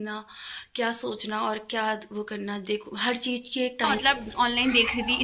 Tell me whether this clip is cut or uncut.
cut